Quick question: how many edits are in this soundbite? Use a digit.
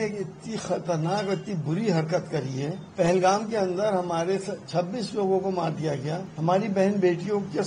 2